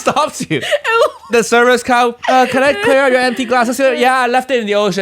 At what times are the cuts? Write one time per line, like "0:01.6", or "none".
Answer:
0:01.3